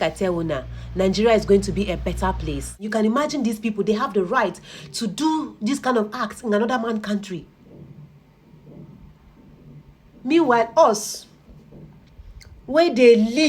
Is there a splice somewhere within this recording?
yes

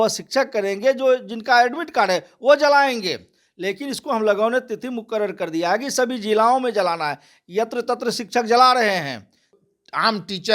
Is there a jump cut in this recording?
yes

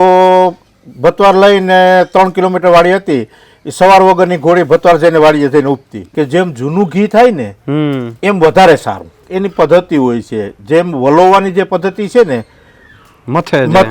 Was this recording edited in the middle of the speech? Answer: yes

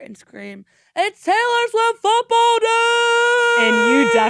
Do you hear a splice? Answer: no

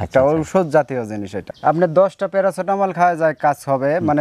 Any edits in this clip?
yes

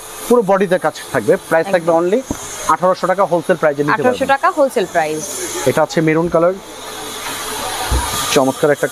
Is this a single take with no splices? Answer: yes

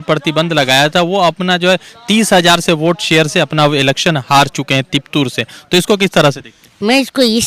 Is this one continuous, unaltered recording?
yes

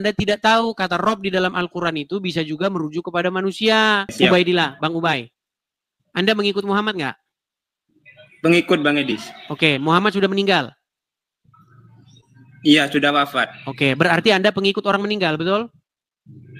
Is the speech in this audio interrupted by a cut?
yes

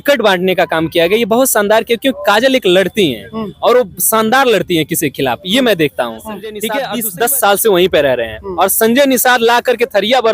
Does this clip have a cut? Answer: yes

